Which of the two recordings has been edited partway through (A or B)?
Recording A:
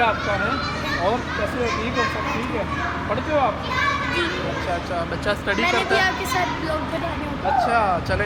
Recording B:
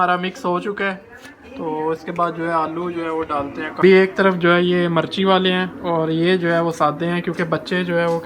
B